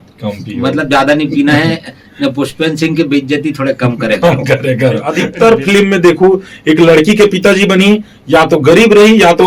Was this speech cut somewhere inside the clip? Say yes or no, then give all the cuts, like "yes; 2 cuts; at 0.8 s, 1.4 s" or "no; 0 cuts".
yes; 1 cut; at 5.3 s